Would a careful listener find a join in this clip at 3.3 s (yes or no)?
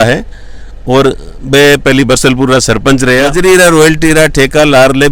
yes